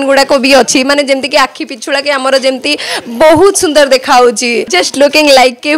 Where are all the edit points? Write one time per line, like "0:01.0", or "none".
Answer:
0:04.8

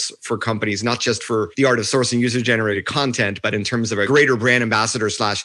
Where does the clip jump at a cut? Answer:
0:01.5
0:02.8
0:04.1

